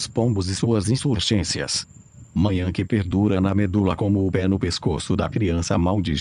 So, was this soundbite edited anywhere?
yes; 1 cut; at 0.9 s

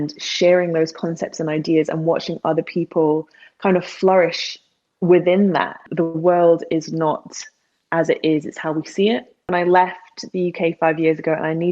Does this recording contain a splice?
yes; 2 cuts; at 5.8 s, 9.5 s

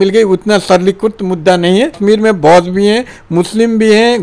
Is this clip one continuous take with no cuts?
no; 1 cut; at 2.0 s

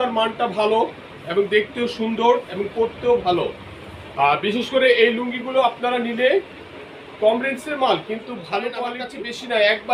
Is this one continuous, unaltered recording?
no; 1 cut; at 9.0 s

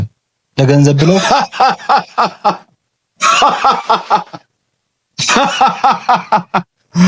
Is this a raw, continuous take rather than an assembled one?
yes; 0 cuts

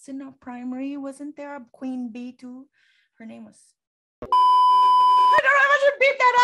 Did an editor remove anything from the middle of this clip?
no; 0 cuts

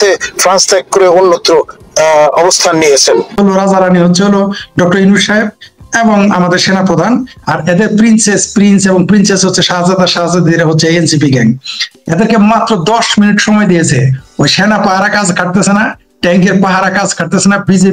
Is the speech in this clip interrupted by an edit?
yes; 1 cut; at 3.3 s

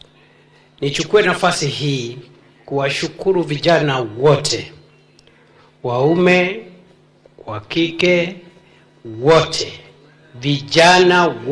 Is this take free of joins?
yes; 0 cuts

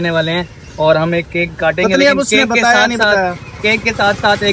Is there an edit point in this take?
no; 0 cuts

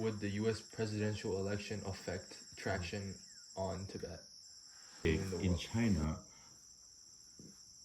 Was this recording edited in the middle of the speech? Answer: yes; 1 cut; at 5.0 s

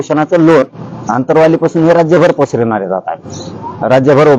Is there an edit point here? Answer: no; 0 cuts

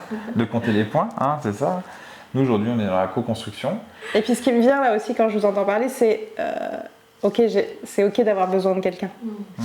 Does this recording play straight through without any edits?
no; 1 cut; at 3.9 s

